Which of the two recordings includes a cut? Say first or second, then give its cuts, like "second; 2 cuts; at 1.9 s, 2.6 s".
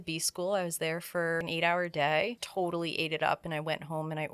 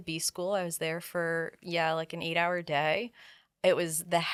first; 2 cuts; at 1.4 s, 2.4 s